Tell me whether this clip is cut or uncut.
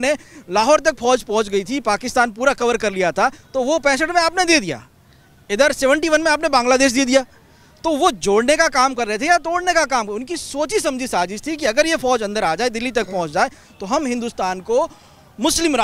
uncut